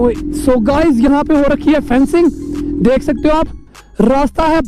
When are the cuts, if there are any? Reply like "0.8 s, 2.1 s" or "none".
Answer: none

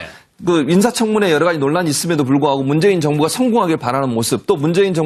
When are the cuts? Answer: none

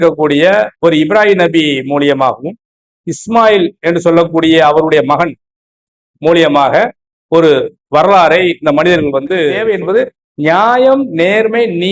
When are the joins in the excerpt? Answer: 9.6 s

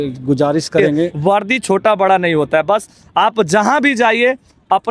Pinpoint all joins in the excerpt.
1.1 s

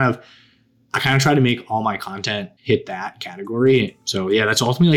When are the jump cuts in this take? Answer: 2.5 s, 4.0 s

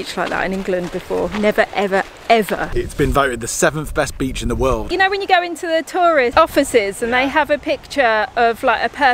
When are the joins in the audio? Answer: 2.7 s, 4.8 s, 6.3 s

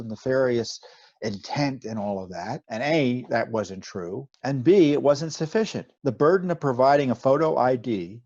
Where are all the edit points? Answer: 2.6 s, 4.3 s, 5.8 s, 7.2 s

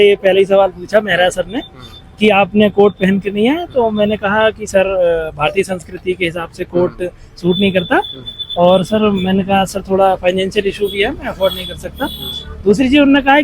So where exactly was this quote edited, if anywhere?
none

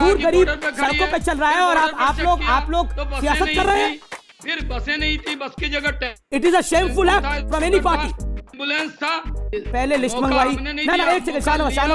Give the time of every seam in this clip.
none

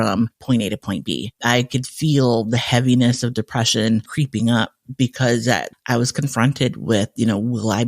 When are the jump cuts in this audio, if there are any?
1.3 s, 4.1 s, 5.7 s

